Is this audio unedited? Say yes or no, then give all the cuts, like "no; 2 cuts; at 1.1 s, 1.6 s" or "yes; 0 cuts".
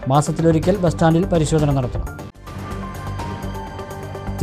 yes; 0 cuts